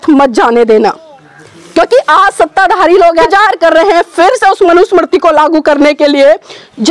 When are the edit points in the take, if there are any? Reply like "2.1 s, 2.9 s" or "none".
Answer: 3.2 s